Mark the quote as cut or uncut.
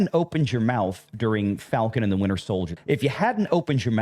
cut